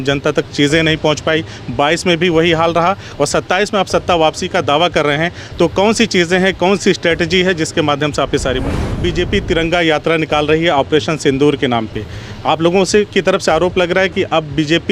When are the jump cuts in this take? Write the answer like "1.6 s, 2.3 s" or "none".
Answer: 9.0 s